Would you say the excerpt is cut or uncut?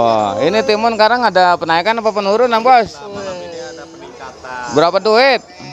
uncut